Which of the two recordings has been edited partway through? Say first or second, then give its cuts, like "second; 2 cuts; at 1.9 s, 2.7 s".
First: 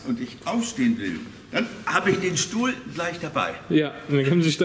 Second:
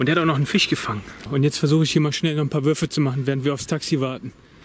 second; 1 cut; at 1.3 s